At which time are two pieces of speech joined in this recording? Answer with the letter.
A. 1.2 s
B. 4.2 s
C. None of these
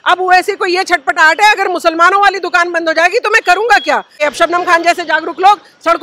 B